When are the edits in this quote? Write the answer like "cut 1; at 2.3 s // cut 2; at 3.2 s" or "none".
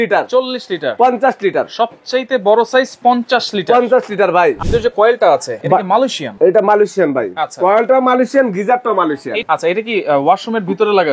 cut 1; at 4.6 s // cut 2; at 6.0 s // cut 3; at 9.4 s